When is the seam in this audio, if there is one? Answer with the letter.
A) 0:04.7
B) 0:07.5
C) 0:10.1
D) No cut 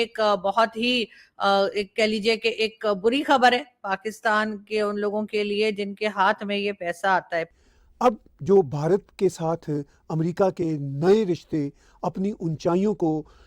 B